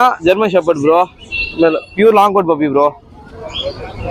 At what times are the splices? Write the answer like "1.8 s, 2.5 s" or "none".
none